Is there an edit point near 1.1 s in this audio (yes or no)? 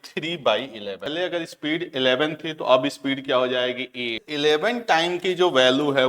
yes